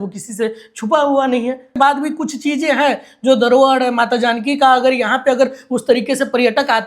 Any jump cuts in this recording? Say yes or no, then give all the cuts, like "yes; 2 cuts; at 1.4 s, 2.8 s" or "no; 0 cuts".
yes; 1 cut; at 1.7 s